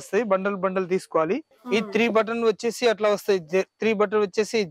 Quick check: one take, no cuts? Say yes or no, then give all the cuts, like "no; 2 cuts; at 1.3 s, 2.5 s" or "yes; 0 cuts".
no; 1 cut; at 1.5 s